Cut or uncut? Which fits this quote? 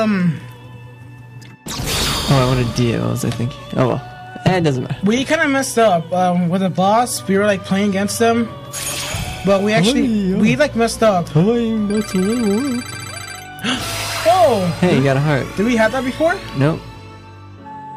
cut